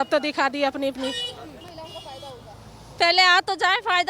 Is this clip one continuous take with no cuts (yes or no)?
no